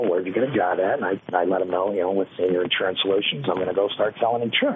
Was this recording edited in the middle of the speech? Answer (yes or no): no